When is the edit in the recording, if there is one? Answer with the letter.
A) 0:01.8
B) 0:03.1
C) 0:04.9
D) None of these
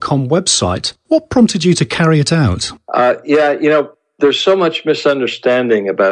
B